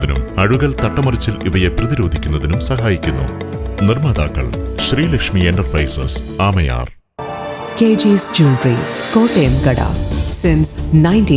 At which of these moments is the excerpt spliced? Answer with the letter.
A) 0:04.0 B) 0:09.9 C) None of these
C